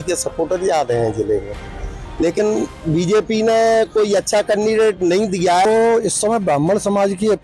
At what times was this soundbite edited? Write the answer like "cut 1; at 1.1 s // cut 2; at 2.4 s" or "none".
cut 1; at 5.6 s